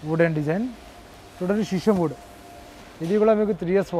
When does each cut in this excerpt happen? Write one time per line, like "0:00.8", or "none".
none